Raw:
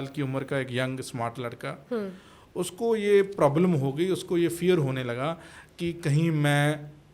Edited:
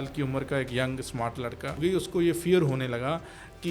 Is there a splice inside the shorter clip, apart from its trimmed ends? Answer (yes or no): yes